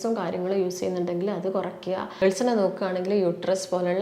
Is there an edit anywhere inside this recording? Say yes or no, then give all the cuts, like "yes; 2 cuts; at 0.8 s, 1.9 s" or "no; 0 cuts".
yes; 1 cut; at 2.2 s